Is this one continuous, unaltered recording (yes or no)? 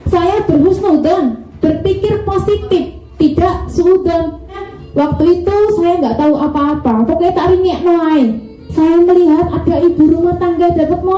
no